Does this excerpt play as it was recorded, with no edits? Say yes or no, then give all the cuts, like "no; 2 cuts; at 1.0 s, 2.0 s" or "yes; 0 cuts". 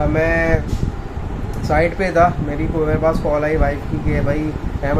yes; 0 cuts